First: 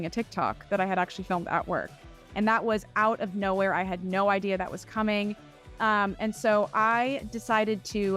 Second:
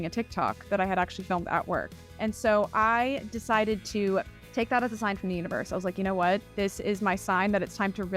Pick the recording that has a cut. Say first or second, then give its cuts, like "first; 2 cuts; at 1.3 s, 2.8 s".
second; 2 cuts; at 2.2 s, 4.4 s